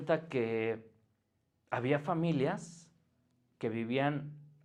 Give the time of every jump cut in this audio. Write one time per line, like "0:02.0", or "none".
none